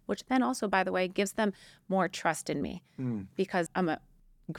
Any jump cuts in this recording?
yes; 1 cut; at 3.7 s

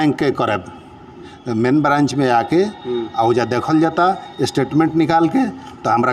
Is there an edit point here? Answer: yes; 1 cut; at 1.4 s

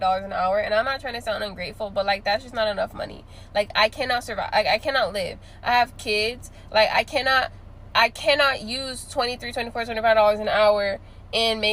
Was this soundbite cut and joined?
no; 0 cuts

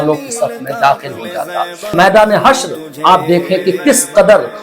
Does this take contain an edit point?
yes; 1 cut; at 1.9 s

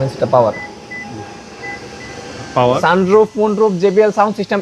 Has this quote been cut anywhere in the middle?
yes; 1 cut; at 2.8 s

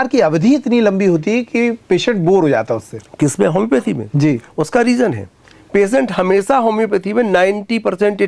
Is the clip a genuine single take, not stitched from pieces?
yes; 0 cuts

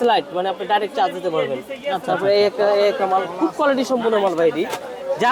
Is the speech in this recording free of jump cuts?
yes; 0 cuts

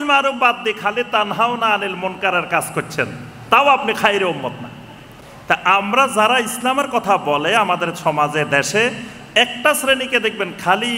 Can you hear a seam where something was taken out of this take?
no; 0 cuts

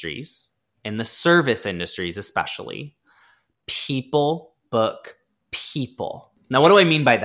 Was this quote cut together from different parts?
yes; 1 cut; at 6.3 s

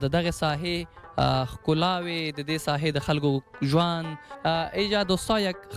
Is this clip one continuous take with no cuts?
no; 1 cut; at 4.3 s

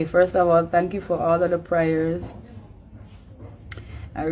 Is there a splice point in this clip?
no; 0 cuts

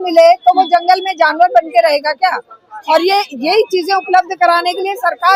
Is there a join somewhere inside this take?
no; 0 cuts

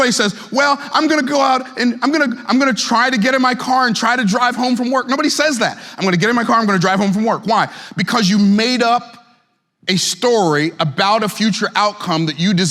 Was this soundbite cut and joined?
no; 0 cuts

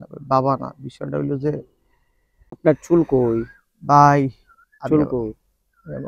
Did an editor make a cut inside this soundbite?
yes; 1 cut; at 2.5 s

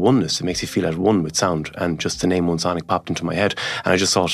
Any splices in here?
no; 0 cuts

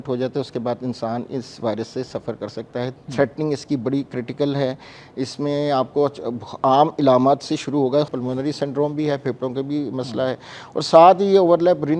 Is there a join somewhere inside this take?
yes; 2 cuts; at 3.0 s, 8.1 s

